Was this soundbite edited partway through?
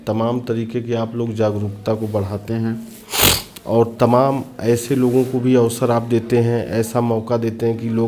no; 0 cuts

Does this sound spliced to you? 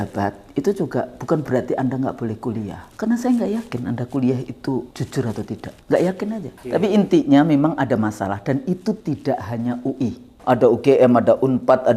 yes; 5 cuts; at 1.4 s, 2.8 s, 5.2 s, 6.7 s, 10.3 s

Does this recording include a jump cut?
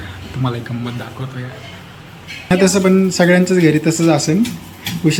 yes; 1 cut; at 2.5 s

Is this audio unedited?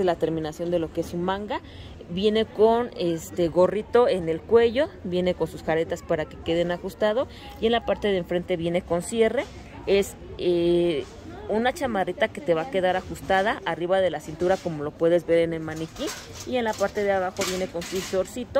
yes; 0 cuts

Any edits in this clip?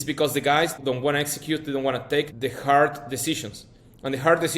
yes; 2 cuts; at 0.8 s, 2.3 s

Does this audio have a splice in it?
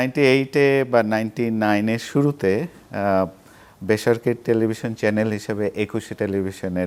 no; 0 cuts

